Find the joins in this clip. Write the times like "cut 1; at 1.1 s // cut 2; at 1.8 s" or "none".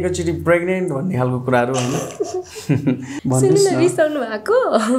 cut 1; at 3.1 s